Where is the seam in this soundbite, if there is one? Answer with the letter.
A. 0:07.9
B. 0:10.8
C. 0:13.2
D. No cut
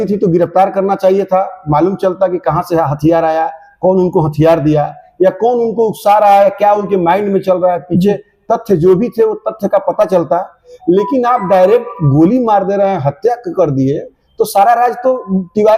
D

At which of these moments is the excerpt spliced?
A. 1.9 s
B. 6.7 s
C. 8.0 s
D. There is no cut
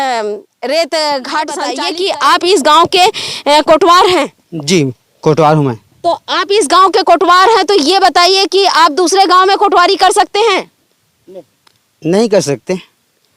A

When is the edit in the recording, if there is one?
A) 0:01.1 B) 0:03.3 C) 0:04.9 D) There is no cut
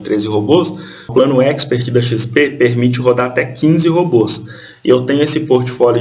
A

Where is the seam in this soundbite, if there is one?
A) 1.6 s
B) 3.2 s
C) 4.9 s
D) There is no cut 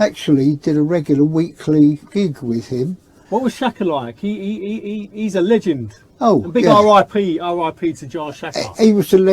B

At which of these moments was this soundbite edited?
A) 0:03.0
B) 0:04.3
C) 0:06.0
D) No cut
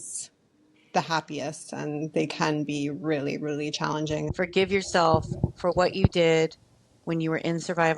B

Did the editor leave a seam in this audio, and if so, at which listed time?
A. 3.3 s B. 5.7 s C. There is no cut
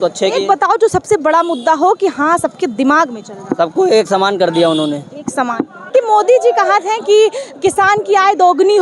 C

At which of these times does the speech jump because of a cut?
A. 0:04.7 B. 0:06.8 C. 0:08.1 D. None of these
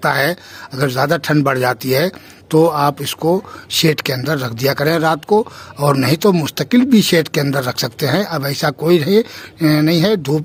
D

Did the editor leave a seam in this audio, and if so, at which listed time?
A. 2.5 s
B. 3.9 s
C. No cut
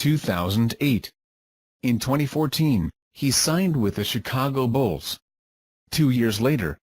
B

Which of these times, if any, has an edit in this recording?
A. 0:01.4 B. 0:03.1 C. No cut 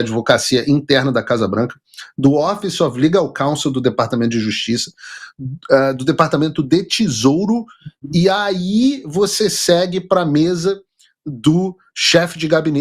C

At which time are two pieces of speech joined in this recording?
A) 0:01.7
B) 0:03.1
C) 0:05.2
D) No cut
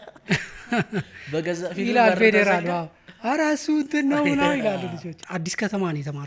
C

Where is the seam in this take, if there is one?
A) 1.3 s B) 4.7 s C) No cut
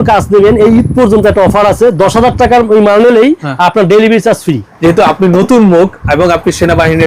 B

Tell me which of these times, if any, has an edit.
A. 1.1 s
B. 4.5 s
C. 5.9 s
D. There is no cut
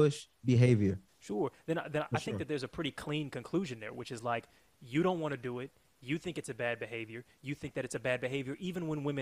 A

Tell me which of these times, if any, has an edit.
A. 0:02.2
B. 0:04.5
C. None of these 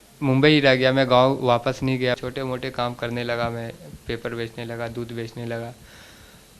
A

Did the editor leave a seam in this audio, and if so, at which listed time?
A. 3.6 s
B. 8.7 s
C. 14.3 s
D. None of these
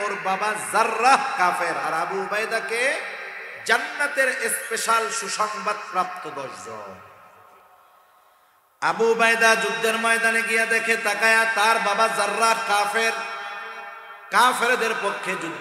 B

